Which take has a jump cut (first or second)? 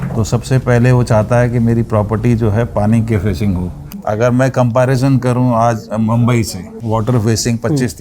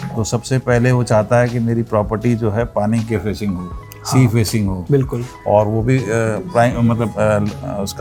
first